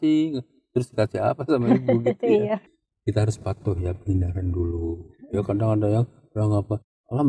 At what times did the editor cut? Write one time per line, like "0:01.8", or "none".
0:02.6